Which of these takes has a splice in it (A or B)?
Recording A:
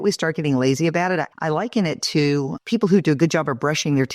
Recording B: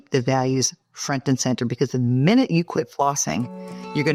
A